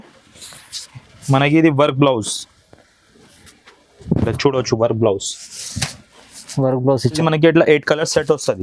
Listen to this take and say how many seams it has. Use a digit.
1